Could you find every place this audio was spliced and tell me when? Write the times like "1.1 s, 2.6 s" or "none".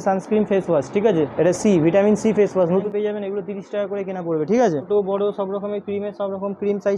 2.8 s, 4.9 s